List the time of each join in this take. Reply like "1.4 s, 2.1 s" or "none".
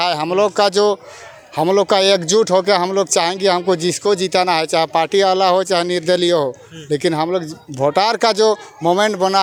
none